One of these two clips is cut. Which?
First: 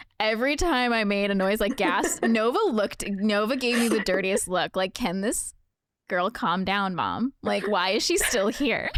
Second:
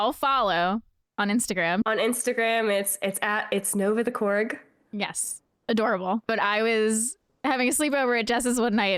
second; 2 cuts; at 1.9 s, 6.3 s

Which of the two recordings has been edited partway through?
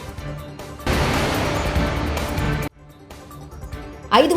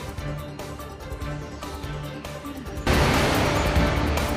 first; 2 cuts; at 0.8 s, 3.2 s

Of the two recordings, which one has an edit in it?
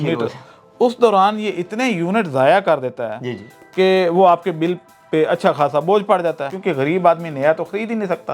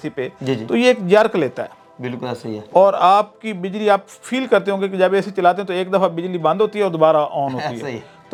first; 1 cut; at 6.5 s

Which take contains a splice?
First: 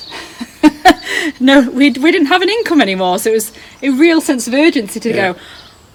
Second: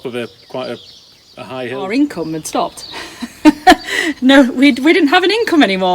second; 1 cut; at 1.8 s

